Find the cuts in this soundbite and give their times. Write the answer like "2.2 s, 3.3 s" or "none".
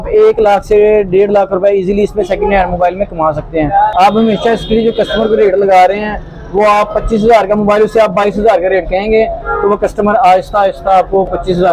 3.9 s

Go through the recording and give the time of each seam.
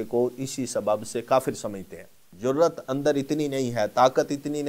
2.2 s

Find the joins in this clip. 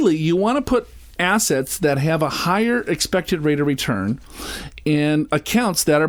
none

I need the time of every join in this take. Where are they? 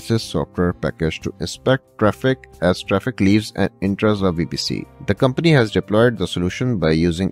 4.9 s

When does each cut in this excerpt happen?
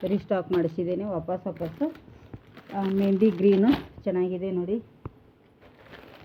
none

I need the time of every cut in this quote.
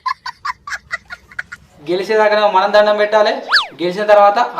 1.7 s

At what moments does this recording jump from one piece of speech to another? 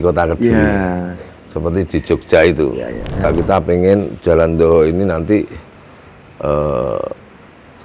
3.3 s

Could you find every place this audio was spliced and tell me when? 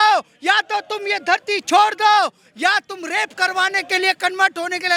none

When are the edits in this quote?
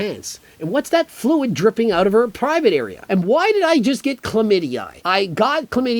4.9 s

